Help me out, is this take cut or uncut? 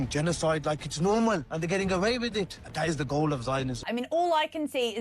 cut